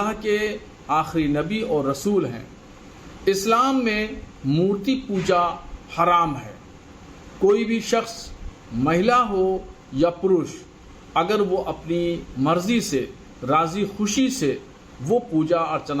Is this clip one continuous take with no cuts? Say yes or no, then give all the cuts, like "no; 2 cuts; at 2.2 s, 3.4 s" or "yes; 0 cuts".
yes; 0 cuts